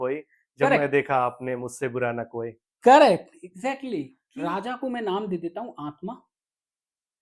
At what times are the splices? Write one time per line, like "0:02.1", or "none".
0:04.2